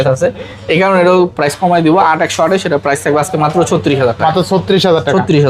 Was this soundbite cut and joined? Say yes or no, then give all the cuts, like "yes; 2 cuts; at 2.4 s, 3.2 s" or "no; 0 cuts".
no; 0 cuts